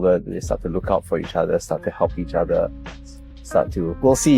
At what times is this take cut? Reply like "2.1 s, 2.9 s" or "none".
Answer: none